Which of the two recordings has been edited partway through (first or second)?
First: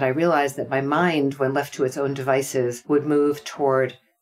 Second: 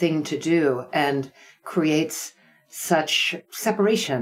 first